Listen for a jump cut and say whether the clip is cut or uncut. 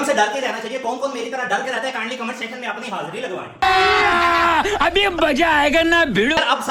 uncut